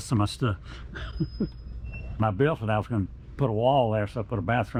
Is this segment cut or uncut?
uncut